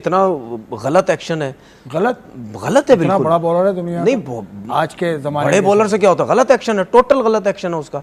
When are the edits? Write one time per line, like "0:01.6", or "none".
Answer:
0:06.8